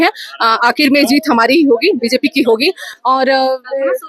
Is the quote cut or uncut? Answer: uncut